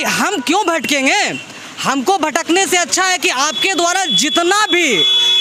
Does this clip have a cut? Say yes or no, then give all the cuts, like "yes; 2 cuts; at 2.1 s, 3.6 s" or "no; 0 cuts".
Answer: no; 0 cuts